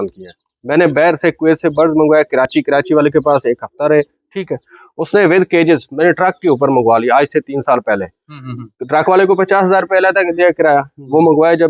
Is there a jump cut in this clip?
no; 0 cuts

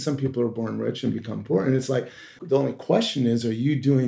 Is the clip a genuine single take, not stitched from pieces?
no; 1 cut; at 2.4 s

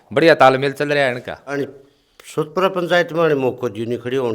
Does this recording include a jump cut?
yes; 1 cut; at 1.6 s

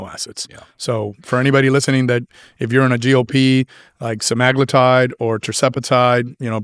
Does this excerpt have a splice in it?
no; 0 cuts

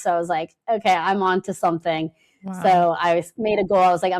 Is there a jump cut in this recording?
no; 0 cuts

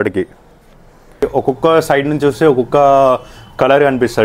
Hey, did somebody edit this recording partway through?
yes; 1 cut; at 1.2 s

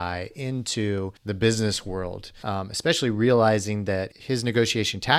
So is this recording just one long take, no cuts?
no; 3 cuts; at 1.2 s, 2.3 s, 4.1 s

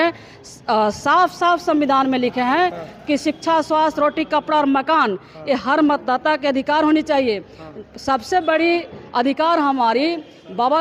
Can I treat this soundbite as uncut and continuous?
yes; 0 cuts

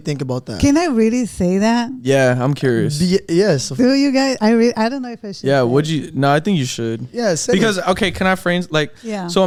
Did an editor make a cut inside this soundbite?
no; 0 cuts

